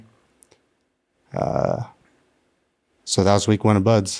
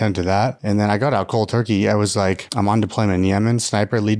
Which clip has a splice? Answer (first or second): second